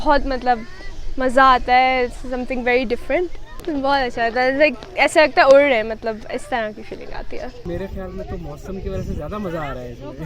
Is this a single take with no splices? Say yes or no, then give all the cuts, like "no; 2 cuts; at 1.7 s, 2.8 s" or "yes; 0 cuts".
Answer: no; 2 cuts; at 3.6 s, 7.3 s